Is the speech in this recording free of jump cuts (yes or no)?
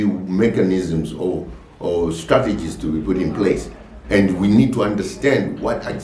yes